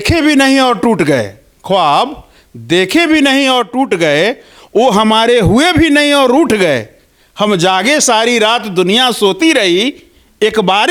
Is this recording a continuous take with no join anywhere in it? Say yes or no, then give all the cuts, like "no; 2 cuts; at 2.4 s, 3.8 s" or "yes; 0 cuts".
yes; 0 cuts